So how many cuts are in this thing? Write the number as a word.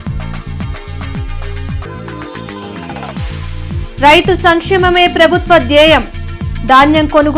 one